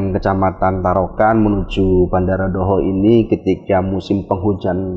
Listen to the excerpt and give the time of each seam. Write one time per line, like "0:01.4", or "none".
none